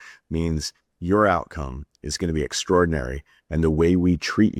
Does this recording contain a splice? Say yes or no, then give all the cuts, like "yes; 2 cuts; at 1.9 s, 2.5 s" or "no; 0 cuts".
no; 0 cuts